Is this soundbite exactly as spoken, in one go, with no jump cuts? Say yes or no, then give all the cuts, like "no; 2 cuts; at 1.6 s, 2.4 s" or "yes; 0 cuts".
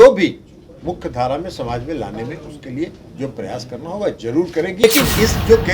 no; 1 cut; at 4.8 s